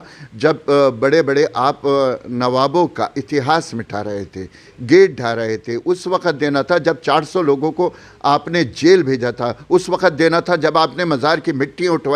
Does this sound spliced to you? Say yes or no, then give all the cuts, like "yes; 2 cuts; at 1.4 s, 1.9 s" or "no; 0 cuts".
no; 0 cuts